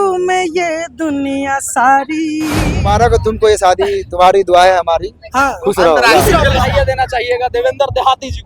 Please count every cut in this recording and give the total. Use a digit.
2